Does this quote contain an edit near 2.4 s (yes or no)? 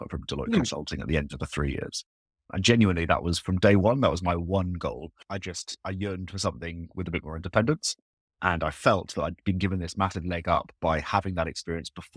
no